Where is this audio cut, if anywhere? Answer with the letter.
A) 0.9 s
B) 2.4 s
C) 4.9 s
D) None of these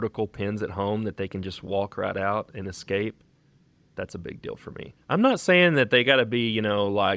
C